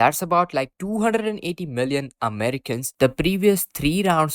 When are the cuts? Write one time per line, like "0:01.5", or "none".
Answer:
0:02.9